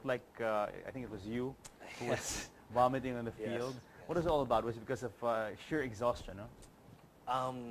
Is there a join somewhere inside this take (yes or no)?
yes